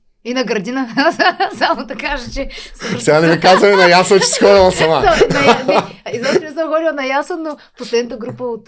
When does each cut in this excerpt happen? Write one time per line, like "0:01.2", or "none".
none